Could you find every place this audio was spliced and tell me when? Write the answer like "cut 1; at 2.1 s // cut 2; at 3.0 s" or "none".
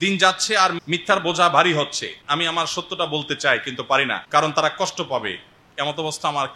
cut 1; at 0.8 s // cut 2; at 2.2 s // cut 3; at 4.2 s